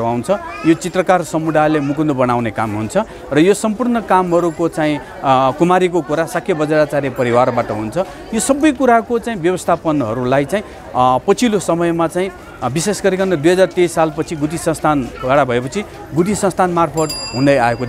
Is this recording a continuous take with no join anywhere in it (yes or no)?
yes